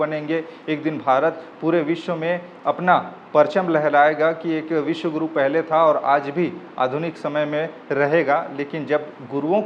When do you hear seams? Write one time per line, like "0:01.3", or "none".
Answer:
none